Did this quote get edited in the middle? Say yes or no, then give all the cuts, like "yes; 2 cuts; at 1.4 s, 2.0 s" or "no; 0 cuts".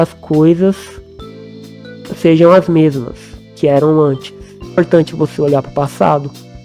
yes; 1 cut; at 4.8 s